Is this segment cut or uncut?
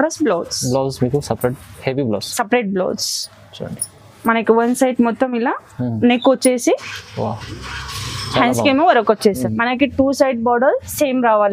cut